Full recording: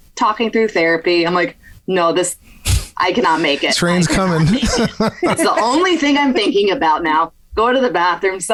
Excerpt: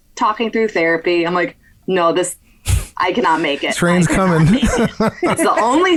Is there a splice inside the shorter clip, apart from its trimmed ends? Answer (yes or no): no